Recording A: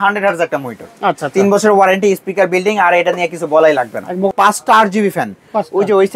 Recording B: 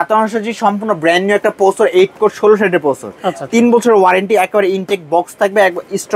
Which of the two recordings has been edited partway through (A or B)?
A